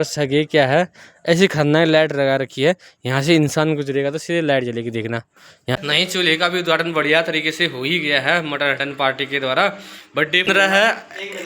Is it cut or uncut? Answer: cut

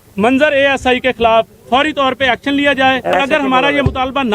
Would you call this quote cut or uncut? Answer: cut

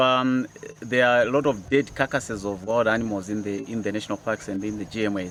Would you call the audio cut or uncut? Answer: uncut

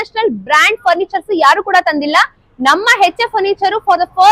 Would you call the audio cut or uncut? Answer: uncut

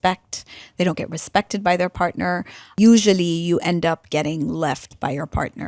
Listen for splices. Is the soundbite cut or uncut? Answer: cut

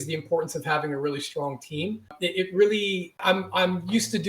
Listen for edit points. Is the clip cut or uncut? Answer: cut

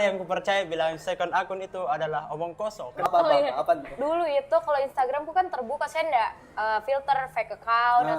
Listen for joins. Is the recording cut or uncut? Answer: cut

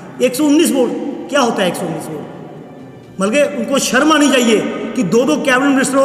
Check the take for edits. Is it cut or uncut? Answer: uncut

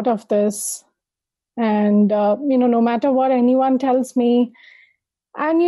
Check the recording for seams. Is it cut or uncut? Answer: uncut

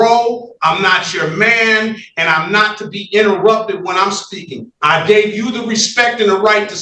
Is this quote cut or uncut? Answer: uncut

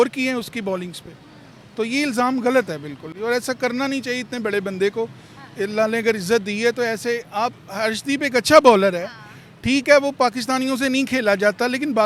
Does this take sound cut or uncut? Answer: uncut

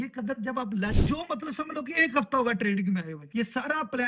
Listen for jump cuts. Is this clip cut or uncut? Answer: cut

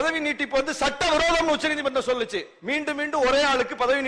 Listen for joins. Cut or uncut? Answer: uncut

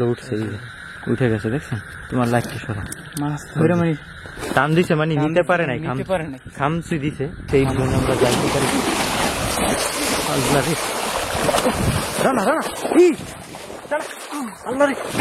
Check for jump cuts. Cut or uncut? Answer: cut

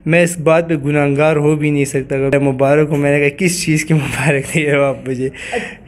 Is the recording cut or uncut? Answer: cut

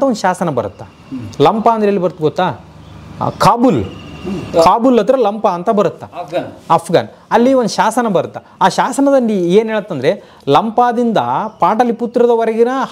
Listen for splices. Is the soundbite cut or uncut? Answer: uncut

